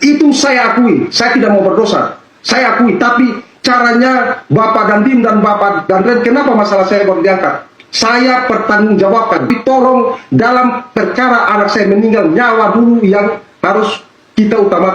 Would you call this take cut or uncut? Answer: cut